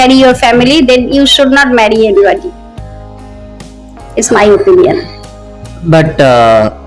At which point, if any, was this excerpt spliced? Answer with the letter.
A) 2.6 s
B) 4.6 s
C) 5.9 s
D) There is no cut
D